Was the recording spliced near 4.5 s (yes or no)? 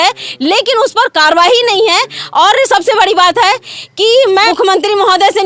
yes